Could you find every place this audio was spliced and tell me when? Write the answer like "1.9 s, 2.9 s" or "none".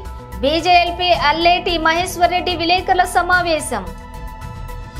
4.0 s